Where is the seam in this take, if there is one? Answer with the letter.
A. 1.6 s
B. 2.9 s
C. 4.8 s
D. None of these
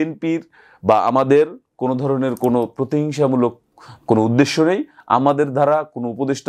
D